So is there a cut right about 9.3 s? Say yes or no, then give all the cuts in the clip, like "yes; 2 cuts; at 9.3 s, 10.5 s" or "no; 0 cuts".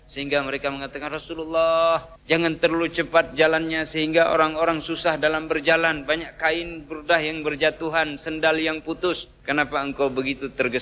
yes; 2 cuts; at 2.1 s, 9.3 s